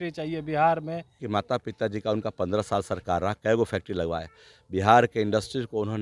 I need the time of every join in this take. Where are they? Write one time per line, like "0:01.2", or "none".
0:01.1